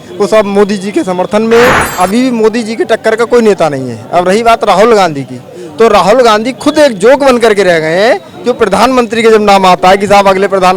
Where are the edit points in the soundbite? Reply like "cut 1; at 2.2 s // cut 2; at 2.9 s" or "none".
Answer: cut 1; at 1.9 s